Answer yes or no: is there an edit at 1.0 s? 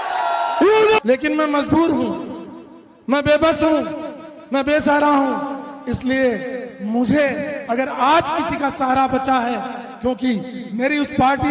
yes